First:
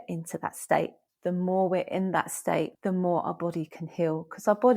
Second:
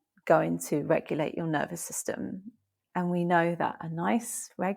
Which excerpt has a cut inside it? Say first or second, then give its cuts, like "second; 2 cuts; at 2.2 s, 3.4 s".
first; 2 cuts; at 1.0 s, 2.7 s